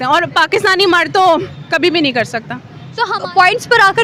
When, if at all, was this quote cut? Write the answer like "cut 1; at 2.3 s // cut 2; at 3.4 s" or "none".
cut 1; at 3.0 s

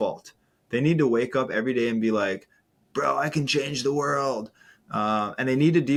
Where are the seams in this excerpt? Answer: none

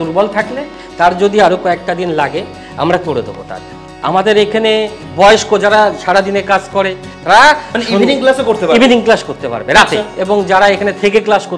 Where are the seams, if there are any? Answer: cut 1; at 3.9 s // cut 2; at 7.1 s // cut 3; at 10.1 s

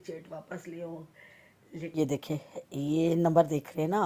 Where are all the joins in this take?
cut 1; at 1.9 s

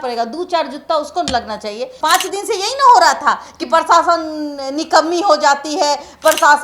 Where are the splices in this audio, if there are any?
cut 1; at 1.9 s

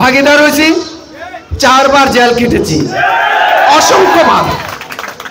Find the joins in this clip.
none

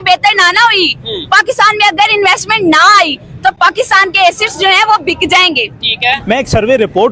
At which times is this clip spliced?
none

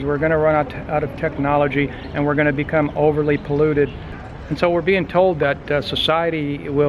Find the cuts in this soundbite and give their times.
cut 1; at 4.2 s

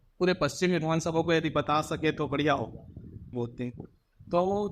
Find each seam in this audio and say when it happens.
cut 1; at 3.3 s

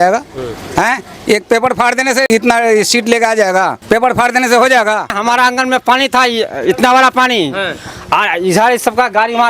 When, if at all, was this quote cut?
cut 1; at 2.3 s // cut 2; at 3.8 s // cut 3; at 5.2 s

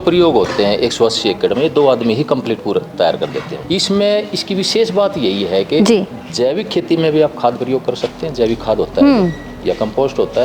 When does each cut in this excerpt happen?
cut 1; at 3.6 s

